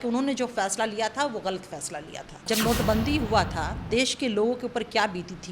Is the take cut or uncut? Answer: cut